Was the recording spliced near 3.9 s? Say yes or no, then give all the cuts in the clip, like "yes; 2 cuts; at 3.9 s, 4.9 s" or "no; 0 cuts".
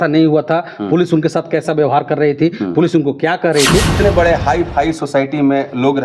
yes; 1 cut; at 3.9 s